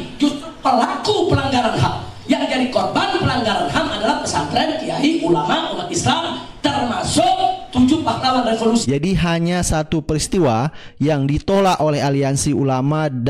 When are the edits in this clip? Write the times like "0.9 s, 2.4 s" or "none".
8.8 s